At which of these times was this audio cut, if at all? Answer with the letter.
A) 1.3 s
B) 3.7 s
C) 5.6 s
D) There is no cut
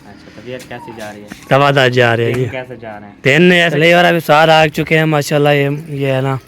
B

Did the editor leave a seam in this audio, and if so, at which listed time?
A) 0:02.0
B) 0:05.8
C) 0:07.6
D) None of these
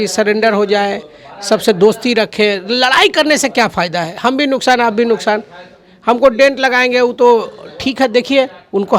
D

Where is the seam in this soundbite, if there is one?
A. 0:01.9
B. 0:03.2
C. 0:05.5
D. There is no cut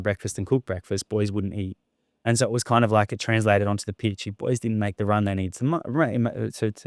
D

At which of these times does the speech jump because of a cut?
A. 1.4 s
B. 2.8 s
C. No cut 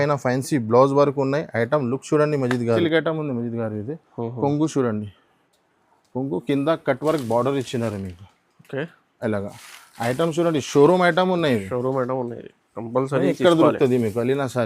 B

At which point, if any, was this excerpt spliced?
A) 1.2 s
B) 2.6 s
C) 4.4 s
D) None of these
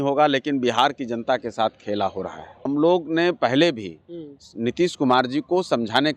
B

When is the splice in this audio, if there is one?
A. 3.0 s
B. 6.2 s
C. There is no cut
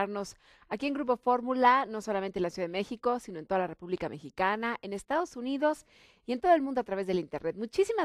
C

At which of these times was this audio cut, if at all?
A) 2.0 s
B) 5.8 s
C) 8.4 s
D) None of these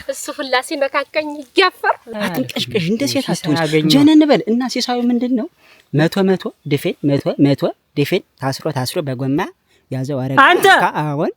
A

